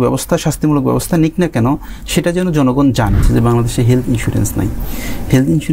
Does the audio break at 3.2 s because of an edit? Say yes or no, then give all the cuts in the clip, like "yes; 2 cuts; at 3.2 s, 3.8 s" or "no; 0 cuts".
yes; 1 cut; at 3.2 s